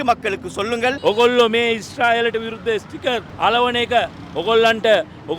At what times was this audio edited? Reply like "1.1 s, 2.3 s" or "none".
1.0 s